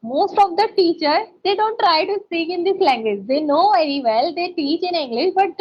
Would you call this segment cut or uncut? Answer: uncut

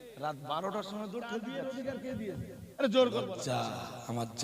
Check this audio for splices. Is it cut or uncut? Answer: cut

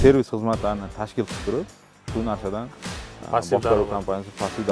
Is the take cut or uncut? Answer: uncut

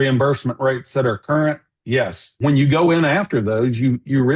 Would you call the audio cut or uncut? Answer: cut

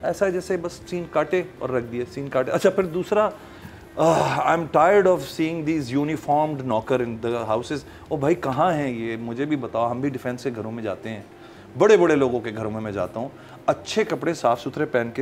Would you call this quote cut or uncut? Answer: uncut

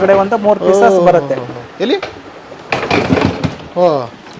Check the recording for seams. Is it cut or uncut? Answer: uncut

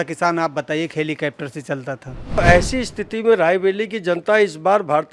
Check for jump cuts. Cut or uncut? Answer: cut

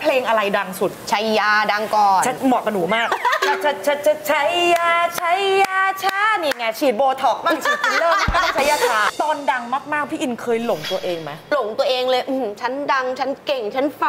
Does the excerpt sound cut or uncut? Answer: cut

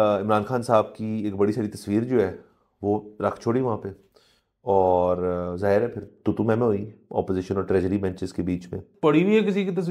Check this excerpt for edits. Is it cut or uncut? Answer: cut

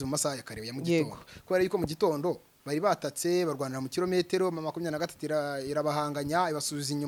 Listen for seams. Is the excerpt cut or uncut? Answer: uncut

